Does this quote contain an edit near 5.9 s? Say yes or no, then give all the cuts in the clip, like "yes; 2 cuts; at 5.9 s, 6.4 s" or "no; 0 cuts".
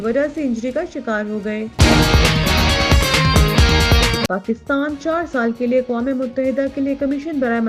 no; 2 cuts; at 1.7 s, 4.3 s